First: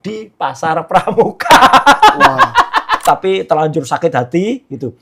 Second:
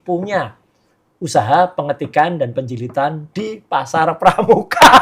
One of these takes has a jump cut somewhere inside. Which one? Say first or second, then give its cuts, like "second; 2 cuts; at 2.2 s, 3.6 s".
first; 1 cut; at 2.9 s